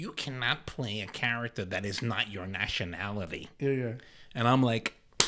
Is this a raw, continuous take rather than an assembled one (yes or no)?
yes